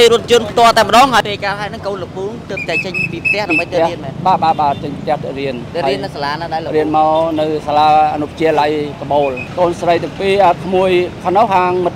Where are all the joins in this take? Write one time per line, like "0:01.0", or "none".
0:01.2
0:09.4